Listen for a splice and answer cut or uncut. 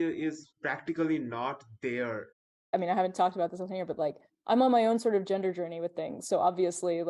cut